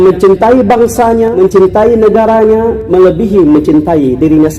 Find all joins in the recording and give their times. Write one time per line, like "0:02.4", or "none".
0:01.3
0:02.8